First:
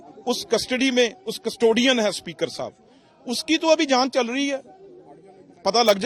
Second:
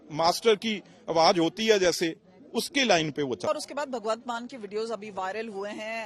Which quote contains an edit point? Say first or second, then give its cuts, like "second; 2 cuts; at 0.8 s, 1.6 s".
second; 1 cut; at 3.5 s